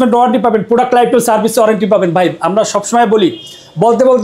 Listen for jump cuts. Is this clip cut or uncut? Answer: uncut